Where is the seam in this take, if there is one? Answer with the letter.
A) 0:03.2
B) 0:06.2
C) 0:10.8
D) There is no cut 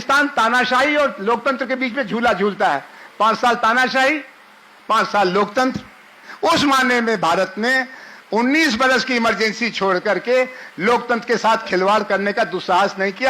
B